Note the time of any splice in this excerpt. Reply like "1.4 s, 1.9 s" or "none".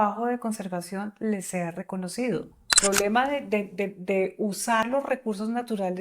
2.8 s, 4.9 s